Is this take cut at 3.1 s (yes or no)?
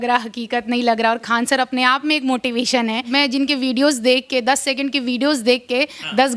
yes